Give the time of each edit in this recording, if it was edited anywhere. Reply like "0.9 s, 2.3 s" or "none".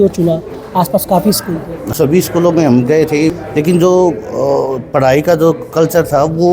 1.9 s